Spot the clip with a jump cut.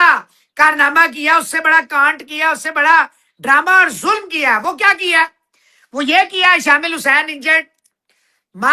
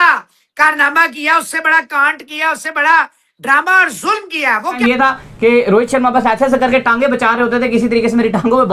second; 1 cut; at 4.7 s

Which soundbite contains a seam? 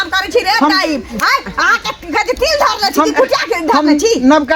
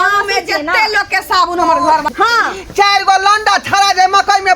second; 1 cut; at 2.1 s

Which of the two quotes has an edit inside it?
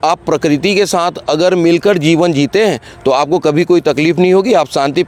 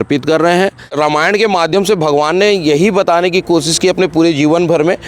second; 1 cut; at 0.9 s

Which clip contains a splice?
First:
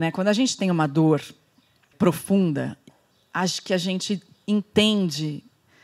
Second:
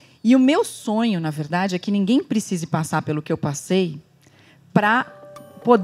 first; 1 cut; at 1.9 s

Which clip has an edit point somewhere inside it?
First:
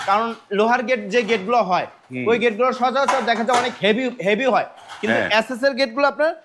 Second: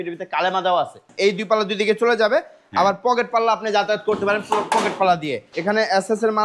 second; 2 cuts; at 1.1 s, 5.5 s

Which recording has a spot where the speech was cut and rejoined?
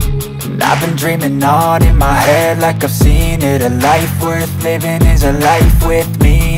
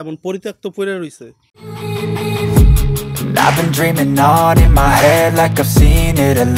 second; 1 cut; at 1.5 s

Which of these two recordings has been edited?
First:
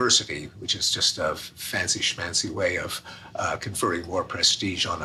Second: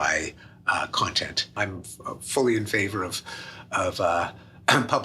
second; 1 cut; at 1.5 s

